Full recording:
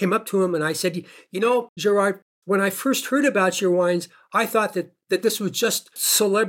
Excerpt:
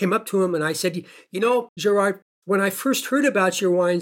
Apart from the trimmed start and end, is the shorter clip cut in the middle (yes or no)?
no